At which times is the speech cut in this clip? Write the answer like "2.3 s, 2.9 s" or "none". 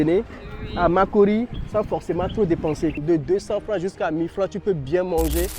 3.0 s